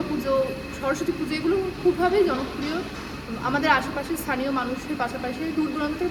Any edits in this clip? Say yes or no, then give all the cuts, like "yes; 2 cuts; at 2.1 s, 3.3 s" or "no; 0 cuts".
no; 0 cuts